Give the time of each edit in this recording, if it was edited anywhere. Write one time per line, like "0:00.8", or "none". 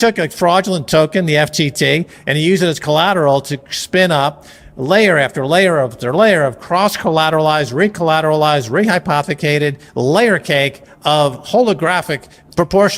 none